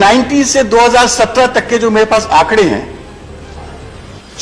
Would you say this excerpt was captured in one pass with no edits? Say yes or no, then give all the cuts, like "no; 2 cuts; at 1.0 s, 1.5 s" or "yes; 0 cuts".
yes; 0 cuts